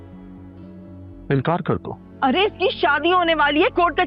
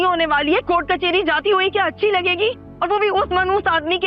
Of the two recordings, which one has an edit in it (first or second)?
first